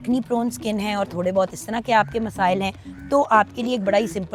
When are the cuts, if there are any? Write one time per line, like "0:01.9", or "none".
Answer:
none